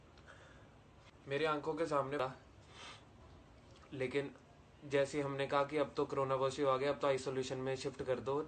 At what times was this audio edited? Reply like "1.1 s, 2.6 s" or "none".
2.2 s